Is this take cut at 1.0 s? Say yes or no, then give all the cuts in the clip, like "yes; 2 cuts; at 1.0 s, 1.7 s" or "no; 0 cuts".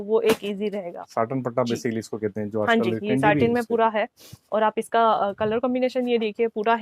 yes; 1 cut; at 1.0 s